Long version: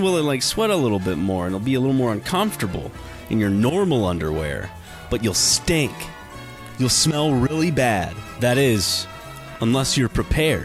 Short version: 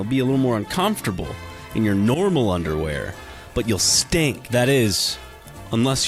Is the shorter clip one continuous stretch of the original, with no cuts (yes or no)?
no